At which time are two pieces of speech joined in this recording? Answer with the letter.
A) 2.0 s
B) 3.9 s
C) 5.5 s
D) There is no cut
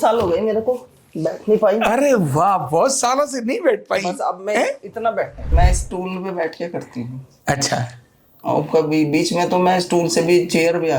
C